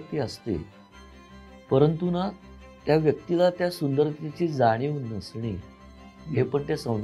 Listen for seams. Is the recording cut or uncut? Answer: uncut